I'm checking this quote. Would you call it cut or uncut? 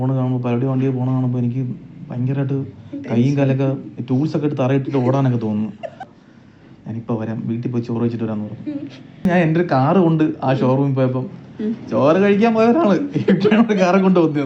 cut